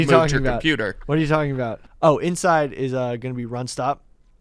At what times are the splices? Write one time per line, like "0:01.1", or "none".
0:01.8

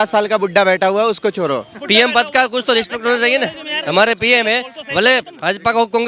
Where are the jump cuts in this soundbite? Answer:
0:01.7

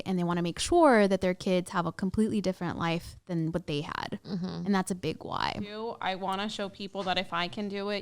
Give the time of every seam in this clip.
0:05.8

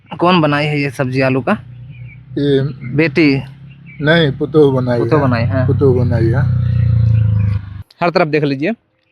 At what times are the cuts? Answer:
0:07.8

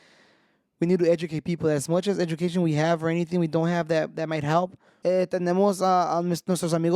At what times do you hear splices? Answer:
0:04.8

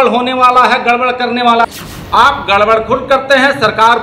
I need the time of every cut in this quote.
0:01.6

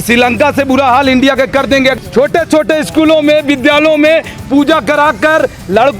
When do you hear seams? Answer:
0:01.9

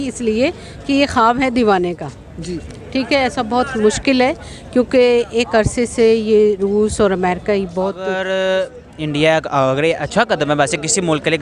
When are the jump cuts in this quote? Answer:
0:07.9

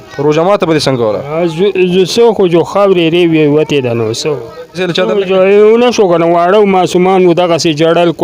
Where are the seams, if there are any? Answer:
0:04.8

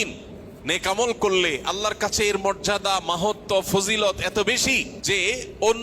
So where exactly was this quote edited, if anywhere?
0:04.9

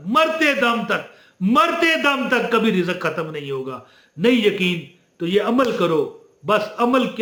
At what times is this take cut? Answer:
none

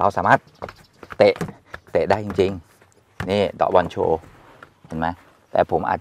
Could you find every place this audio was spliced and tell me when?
none

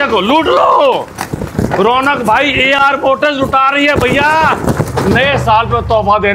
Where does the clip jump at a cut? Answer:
none

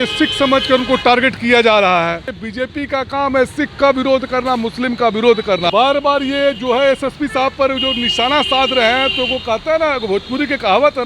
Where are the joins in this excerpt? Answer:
0:02.4
0:05.7

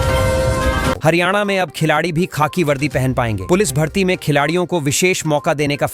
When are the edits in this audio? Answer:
0:01.0

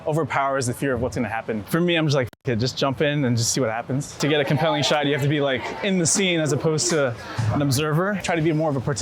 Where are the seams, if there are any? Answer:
0:01.6
0:04.2
0:08.2

